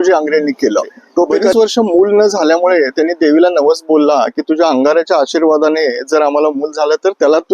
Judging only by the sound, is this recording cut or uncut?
cut